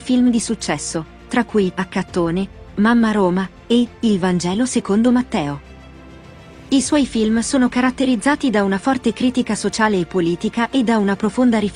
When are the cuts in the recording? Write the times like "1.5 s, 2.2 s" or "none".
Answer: none